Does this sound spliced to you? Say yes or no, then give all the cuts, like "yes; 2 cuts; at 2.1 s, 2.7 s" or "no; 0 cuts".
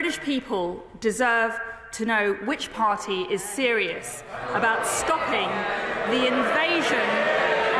no; 0 cuts